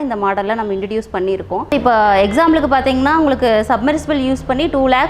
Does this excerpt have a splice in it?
yes; 1 cut; at 1.7 s

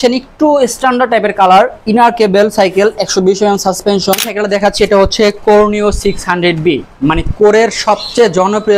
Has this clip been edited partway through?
yes; 1 cut; at 4.3 s

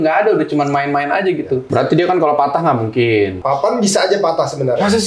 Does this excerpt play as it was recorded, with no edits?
no; 2 cuts; at 1.6 s, 3.4 s

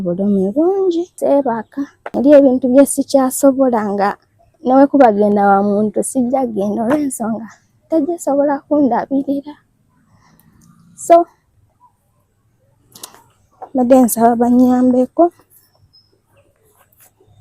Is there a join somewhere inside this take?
yes; 2 cuts; at 1.1 s, 2.0 s

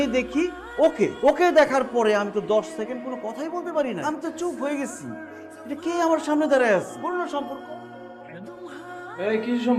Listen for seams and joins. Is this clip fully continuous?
yes; 0 cuts

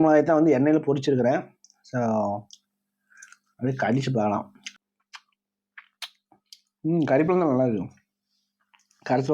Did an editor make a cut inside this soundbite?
yes; 1 cut; at 4.8 s

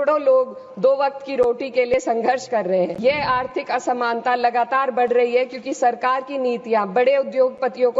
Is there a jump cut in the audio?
yes; 1 cut; at 3.0 s

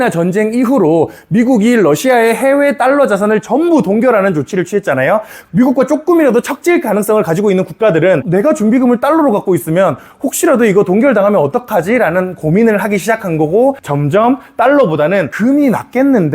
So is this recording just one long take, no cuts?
no; 4 cuts; at 5.4 s, 8.2 s, 13.9 s, 15.3 s

